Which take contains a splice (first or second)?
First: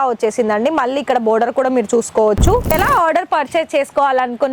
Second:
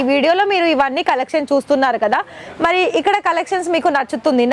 first